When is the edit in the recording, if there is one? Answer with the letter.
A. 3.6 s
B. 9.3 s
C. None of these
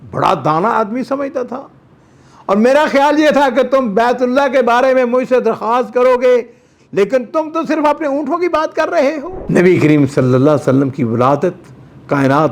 B